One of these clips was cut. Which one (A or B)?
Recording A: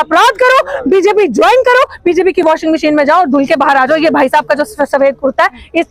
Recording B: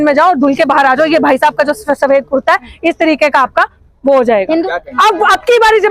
B